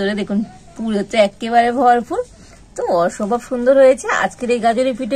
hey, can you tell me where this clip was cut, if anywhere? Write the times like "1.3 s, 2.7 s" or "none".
none